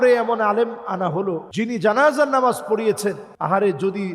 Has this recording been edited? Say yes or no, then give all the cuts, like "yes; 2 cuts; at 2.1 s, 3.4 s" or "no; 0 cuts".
yes; 2 cuts; at 1.5 s, 3.3 s